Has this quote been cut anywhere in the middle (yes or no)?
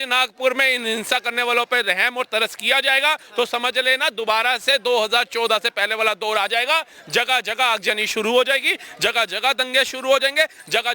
no